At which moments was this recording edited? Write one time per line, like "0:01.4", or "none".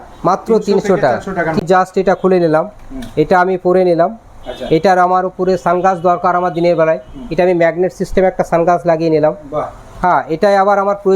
0:01.6